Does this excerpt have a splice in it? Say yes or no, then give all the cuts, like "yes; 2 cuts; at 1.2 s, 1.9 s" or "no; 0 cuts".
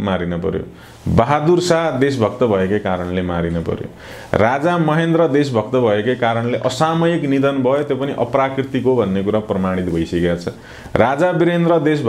no; 0 cuts